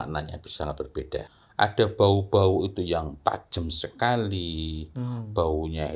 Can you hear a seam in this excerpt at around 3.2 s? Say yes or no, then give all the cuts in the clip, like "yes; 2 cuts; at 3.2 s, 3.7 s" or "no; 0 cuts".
no; 1 cut; at 1.4 s